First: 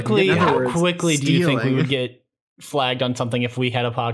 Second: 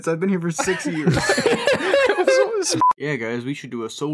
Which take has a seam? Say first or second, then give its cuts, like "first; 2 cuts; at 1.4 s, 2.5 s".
second; 1 cut; at 2.8 s